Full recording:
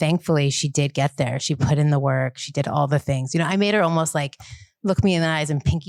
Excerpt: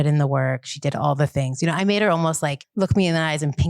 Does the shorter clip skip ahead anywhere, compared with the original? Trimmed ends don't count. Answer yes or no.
yes